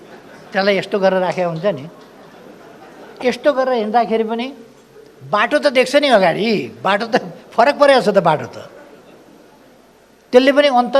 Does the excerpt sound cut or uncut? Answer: uncut